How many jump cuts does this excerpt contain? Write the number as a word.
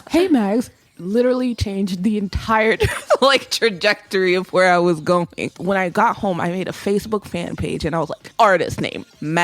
two